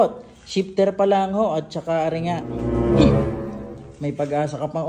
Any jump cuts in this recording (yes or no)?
no